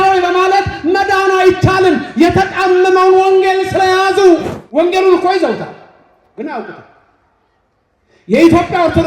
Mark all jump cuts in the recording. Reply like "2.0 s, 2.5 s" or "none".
4.6 s